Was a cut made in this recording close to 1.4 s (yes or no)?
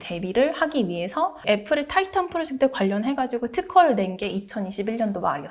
yes